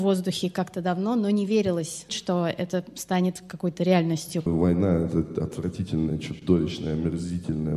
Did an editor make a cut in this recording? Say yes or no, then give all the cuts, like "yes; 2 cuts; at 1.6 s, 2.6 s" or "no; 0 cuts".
yes; 2 cuts; at 2.2 s, 4.5 s